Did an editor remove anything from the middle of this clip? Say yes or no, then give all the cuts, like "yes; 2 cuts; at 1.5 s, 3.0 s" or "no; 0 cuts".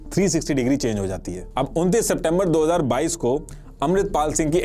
yes; 1 cut; at 1.4 s